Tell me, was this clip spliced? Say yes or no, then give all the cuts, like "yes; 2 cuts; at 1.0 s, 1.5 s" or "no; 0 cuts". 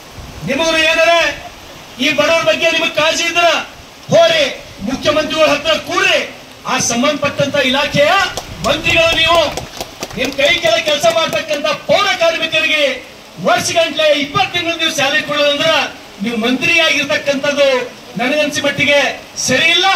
no; 0 cuts